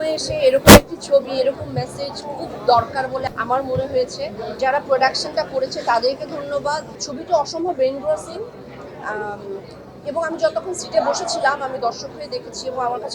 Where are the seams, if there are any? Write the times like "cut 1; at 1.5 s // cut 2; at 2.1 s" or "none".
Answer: none

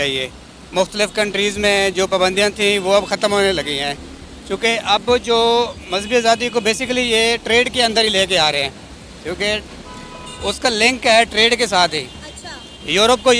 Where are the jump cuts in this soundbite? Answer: none

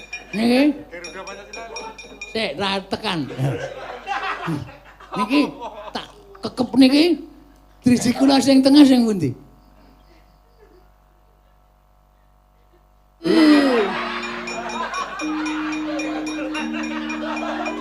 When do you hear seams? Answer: cut 1; at 13.3 s

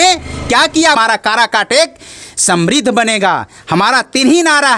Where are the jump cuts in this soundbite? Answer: cut 1; at 1.0 s

